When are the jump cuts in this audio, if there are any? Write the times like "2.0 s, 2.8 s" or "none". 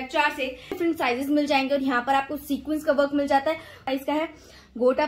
0.8 s, 3.9 s